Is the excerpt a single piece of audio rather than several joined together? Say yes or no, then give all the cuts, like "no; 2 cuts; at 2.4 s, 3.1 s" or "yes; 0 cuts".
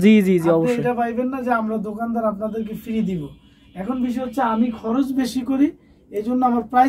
yes; 0 cuts